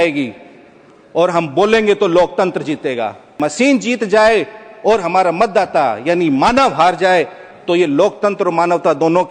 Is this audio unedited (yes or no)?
no